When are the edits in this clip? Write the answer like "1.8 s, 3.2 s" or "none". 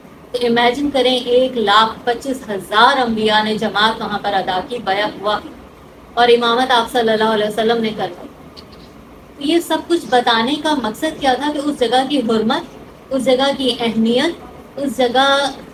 none